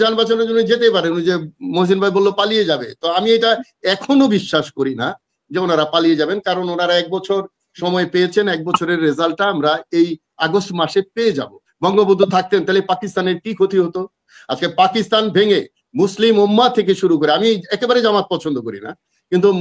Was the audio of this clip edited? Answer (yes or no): yes